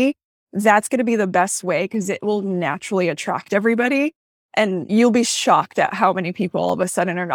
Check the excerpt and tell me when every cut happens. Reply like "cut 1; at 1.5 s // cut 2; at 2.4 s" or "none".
cut 1; at 4.9 s

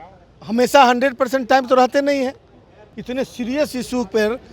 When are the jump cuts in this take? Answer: cut 1; at 2.9 s

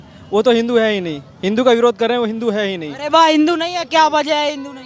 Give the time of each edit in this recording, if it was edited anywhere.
none

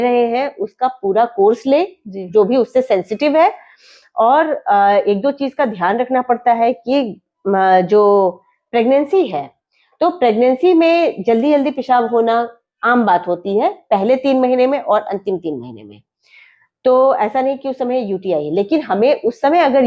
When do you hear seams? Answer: none

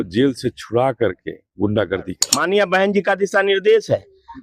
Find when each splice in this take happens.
cut 1; at 2.2 s

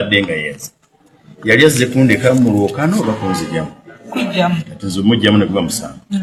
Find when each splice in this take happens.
none

